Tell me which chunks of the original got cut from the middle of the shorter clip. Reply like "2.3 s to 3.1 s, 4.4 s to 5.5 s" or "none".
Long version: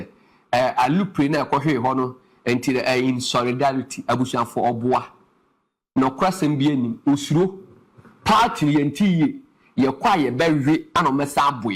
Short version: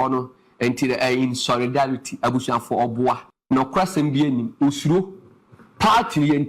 5.2 s to 5.8 s